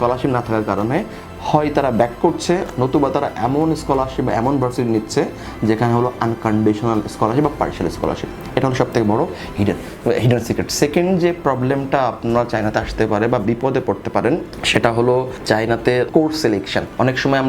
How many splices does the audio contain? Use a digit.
0